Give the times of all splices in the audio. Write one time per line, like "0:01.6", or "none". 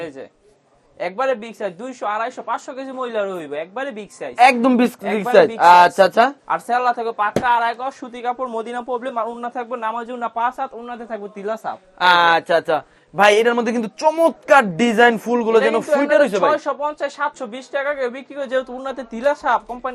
none